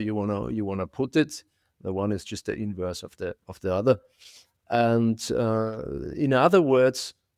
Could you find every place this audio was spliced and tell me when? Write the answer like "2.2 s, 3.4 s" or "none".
none

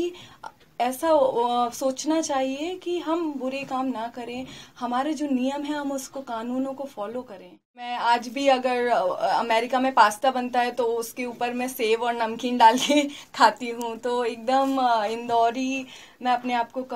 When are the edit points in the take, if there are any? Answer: 7.9 s

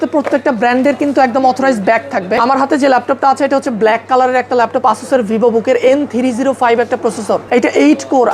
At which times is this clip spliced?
2.4 s, 7.4 s

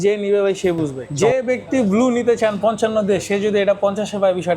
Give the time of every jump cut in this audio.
1.0 s

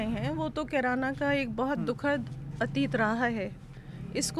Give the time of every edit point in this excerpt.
none

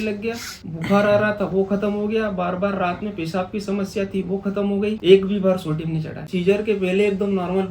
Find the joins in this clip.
5.0 s, 6.3 s

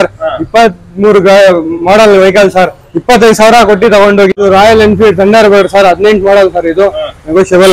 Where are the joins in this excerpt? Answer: 4.4 s

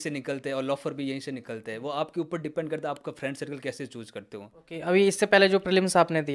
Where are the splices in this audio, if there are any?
4.6 s

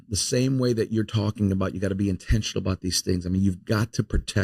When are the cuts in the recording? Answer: none

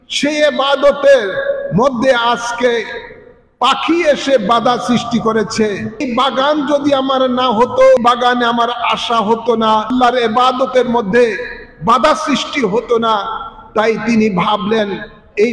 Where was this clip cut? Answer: 6.1 s, 8.0 s, 9.9 s

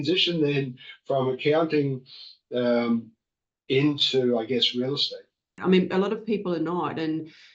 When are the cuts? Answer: 5.6 s

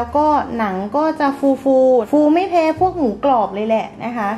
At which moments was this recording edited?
2.1 s

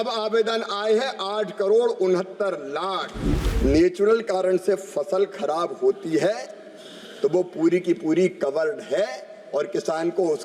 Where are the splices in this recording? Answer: 3.4 s

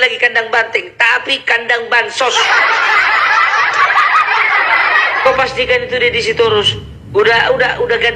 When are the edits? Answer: 5.2 s

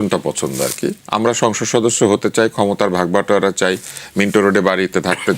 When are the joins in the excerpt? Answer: 1.0 s

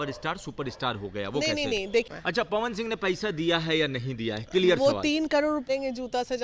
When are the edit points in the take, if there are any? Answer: 2.1 s, 5.6 s

